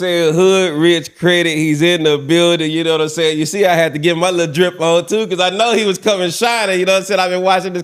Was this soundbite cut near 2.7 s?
no; 0 cuts

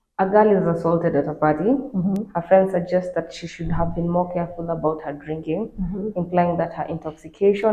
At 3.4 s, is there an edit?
no; 0 cuts

